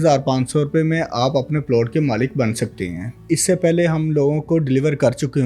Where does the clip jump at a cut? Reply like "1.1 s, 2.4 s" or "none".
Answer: 3.2 s